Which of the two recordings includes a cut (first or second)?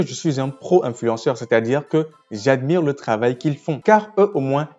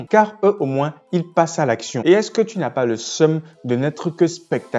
second